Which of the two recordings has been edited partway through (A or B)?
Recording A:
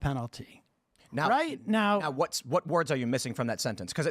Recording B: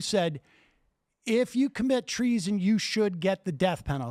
A